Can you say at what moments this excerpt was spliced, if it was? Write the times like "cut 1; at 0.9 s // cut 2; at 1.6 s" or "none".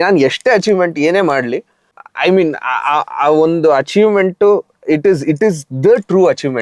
none